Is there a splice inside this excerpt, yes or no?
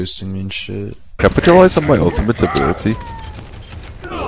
yes